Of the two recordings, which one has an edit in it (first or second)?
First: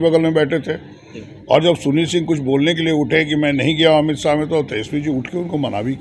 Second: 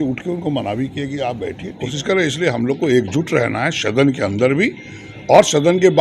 second